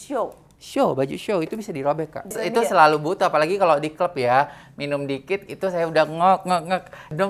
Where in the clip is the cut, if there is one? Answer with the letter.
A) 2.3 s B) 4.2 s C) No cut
A